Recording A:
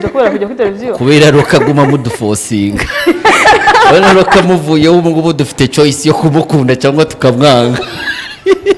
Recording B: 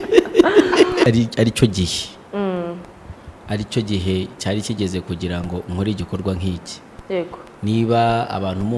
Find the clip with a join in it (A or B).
B